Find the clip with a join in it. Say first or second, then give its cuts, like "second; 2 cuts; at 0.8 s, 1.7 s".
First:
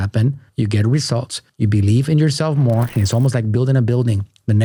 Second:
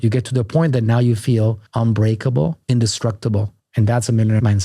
second; 1 cut; at 3.6 s